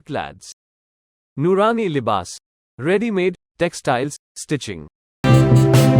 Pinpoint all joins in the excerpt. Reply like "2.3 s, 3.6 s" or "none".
5.1 s